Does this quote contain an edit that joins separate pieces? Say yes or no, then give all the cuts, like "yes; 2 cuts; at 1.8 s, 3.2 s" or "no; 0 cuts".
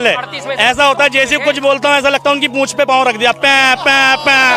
no; 0 cuts